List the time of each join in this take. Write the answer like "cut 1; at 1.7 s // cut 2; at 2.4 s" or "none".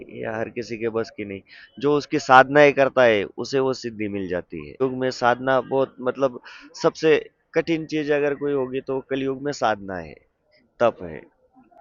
none